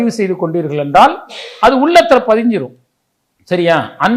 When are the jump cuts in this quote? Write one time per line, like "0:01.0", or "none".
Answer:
none